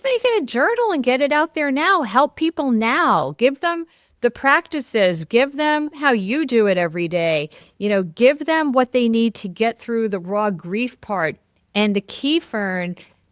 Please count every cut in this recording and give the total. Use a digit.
1